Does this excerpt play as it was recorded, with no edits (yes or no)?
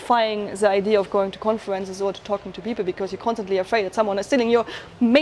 yes